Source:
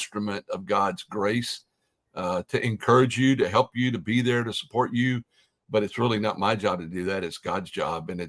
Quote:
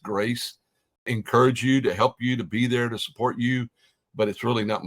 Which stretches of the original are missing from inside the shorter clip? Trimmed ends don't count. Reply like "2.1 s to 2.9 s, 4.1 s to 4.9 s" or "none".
2.1 s to 2.6 s

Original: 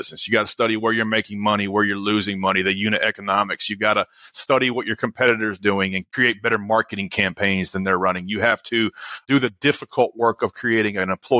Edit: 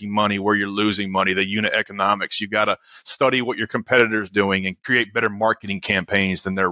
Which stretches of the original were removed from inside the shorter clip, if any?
none

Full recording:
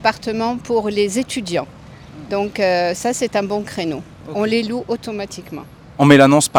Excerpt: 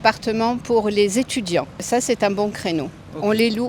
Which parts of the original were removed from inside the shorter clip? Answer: 1.8 s to 3.0 s

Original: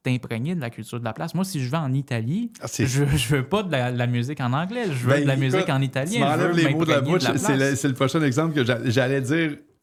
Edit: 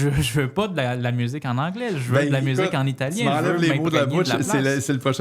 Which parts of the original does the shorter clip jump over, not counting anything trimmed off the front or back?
none

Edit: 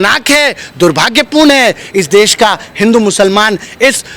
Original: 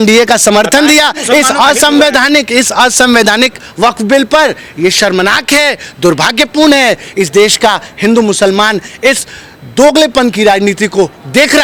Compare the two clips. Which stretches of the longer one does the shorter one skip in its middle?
none

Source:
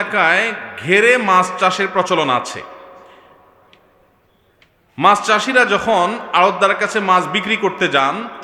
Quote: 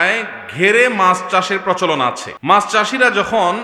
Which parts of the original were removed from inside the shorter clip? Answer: 2.6 s to 4.8 s

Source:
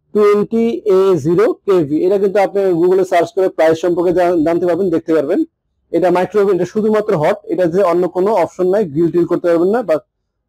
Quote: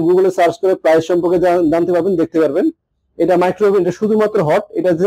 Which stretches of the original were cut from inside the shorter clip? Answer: none

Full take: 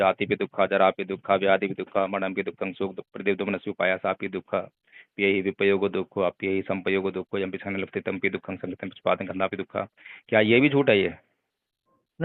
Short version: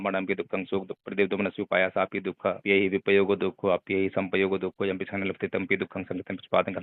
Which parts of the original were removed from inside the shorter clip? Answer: 4.7 s to 5.1 s

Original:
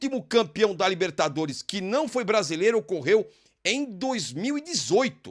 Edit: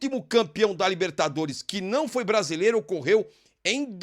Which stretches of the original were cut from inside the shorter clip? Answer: none

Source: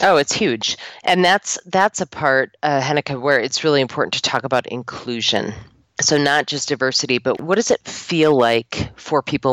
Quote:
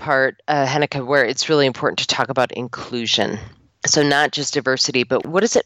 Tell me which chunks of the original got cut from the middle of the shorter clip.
none

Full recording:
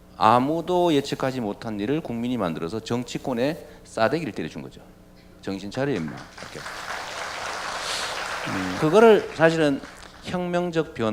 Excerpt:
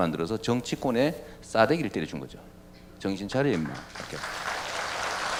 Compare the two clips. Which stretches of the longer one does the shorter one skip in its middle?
none

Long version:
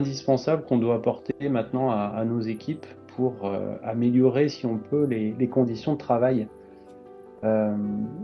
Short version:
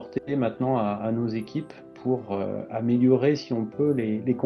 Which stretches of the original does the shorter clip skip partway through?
none

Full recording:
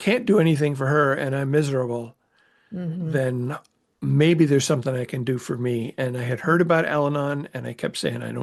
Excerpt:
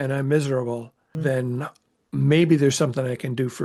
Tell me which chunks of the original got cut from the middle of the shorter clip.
2.4 s to 3.0 s

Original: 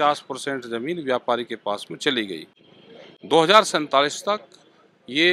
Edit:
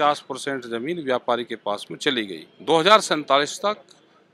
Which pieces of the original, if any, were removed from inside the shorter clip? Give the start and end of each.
2.5 s to 3.1 s

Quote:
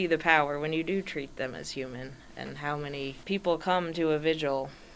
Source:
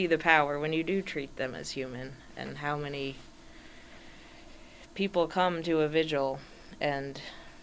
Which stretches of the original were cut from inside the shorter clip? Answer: 3.2 s to 4.9 s

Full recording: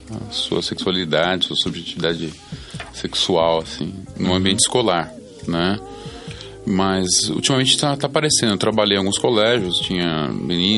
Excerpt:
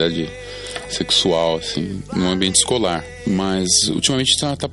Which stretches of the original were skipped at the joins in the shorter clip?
5.2 s to 6.5 s

